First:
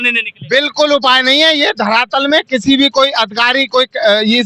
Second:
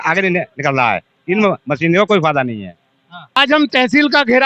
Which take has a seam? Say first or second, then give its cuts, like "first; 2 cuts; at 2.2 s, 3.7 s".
second; 1 cut; at 3.4 s